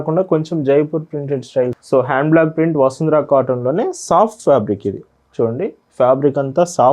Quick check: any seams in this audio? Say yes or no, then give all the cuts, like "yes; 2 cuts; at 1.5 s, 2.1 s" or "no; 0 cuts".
yes; 1 cut; at 1.8 s